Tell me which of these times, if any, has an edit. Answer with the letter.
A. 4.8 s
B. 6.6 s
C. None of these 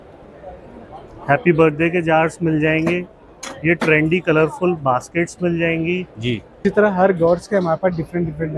B